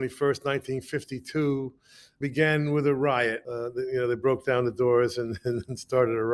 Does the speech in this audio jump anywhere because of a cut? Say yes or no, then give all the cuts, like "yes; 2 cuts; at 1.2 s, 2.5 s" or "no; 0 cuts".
yes; 2 cuts; at 2.1 s, 3.4 s